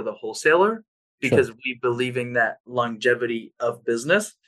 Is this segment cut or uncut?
uncut